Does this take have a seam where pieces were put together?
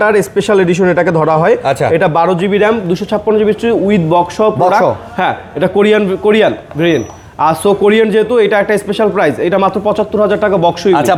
no; 0 cuts

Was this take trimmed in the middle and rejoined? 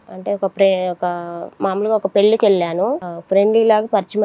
yes; 1 cut; at 3.1 s

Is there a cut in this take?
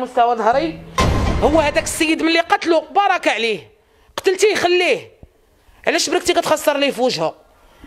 yes; 1 cut; at 0.9 s

